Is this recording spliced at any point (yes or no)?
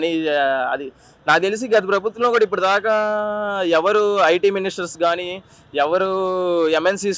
no